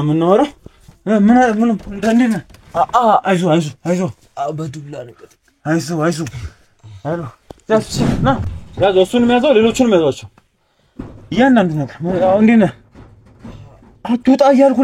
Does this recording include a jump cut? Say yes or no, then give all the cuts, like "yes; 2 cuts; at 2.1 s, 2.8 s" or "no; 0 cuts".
yes; 1 cut; at 8.4 s